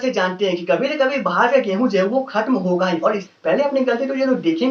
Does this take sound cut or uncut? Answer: cut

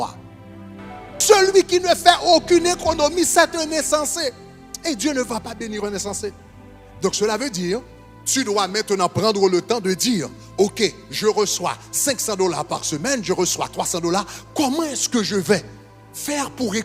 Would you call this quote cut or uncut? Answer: cut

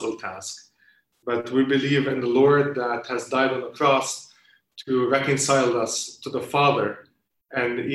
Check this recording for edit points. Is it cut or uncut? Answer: uncut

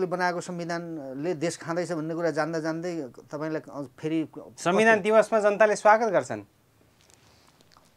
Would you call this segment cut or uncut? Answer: uncut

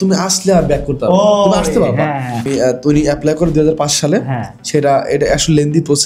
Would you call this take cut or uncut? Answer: cut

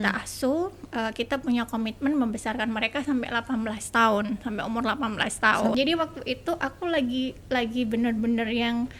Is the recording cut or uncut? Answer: cut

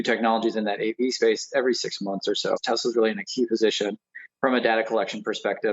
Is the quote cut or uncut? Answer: cut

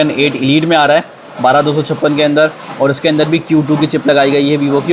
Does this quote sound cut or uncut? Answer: uncut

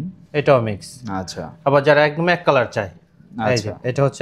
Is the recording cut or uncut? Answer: uncut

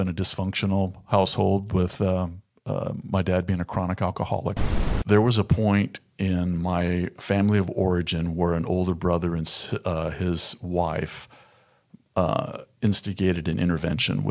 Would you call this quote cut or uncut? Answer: cut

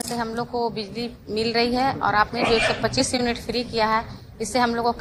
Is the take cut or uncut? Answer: uncut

